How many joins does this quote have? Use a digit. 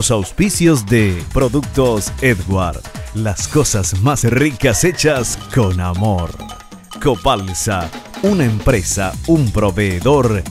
1